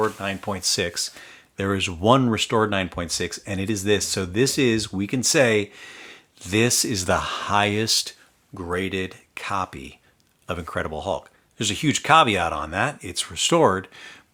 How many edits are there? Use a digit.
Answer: 0